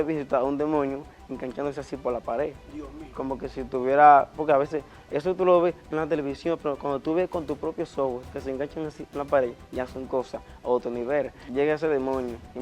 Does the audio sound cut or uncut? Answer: cut